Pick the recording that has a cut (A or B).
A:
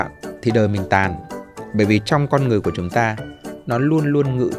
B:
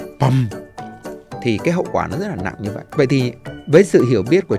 B